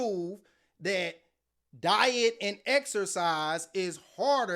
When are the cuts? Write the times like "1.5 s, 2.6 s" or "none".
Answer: none